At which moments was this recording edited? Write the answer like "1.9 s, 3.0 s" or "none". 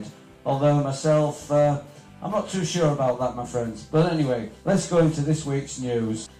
none